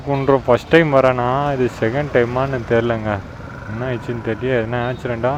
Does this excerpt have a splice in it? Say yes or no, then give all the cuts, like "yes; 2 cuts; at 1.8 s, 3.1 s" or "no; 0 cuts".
no; 0 cuts